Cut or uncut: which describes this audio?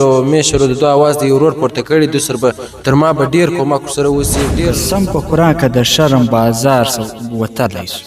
cut